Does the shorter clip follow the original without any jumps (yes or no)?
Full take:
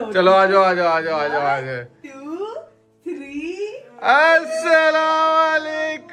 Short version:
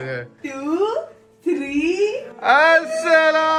yes